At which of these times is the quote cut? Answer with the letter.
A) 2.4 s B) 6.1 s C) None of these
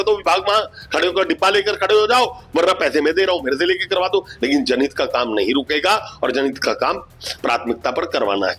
C